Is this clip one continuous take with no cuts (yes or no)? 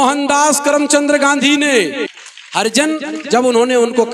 no